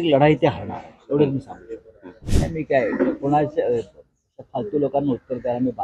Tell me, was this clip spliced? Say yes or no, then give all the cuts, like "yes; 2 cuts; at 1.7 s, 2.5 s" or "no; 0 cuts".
yes; 1 cut; at 2.3 s